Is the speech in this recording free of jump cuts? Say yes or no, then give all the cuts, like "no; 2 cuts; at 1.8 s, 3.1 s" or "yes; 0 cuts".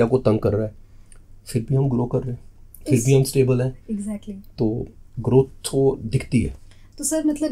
yes; 0 cuts